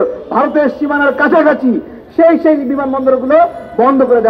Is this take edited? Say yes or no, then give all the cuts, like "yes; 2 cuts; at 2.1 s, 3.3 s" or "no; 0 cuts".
no; 0 cuts